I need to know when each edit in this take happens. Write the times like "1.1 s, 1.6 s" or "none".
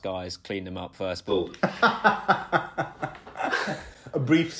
none